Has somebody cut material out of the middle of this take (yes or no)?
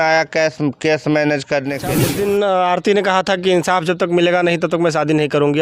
yes